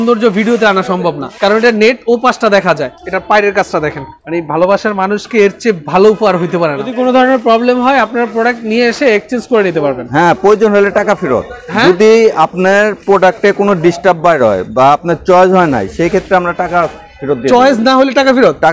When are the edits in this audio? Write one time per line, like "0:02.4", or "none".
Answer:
0:01.3
0:03.0
0:04.1
0:06.8